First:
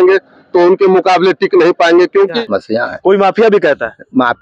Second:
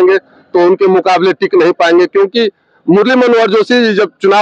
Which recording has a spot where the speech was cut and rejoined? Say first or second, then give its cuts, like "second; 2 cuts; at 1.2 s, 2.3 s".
first; 1 cut; at 2.4 s